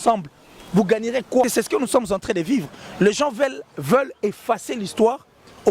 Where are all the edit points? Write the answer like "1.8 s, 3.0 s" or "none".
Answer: 1.4 s